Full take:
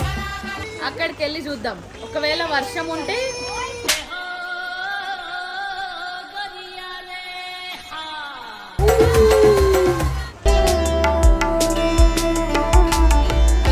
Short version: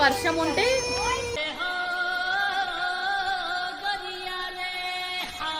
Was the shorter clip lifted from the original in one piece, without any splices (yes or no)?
yes